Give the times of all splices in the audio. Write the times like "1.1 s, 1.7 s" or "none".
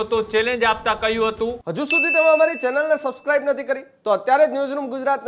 1.6 s